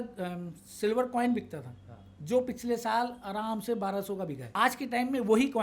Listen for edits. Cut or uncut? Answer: cut